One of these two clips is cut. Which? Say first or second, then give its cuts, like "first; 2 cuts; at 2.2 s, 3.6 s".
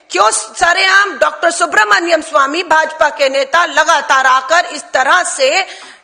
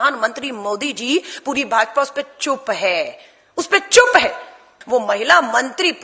second; 1 cut; at 4.7 s